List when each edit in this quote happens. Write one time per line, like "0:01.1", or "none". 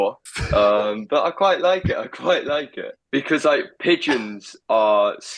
0:03.3